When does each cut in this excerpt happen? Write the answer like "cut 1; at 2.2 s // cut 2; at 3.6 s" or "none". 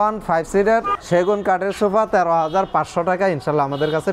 cut 1; at 1.0 s